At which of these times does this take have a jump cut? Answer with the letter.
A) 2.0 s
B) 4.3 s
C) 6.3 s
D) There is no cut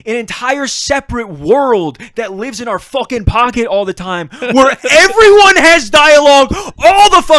D